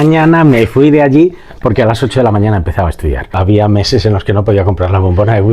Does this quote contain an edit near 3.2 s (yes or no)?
yes